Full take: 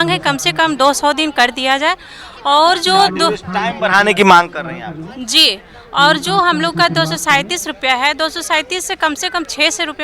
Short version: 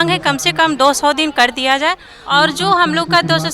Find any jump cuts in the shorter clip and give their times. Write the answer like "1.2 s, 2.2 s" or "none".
2.1 s